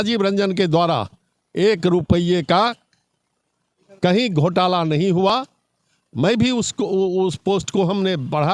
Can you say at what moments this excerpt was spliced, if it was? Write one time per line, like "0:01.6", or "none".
none